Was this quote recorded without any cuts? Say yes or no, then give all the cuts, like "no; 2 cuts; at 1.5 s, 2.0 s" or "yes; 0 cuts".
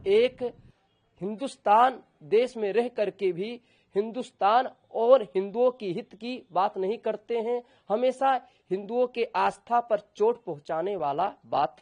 yes; 0 cuts